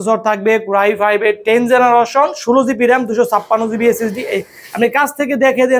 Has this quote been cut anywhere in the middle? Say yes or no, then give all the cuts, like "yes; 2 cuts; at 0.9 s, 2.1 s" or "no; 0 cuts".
no; 0 cuts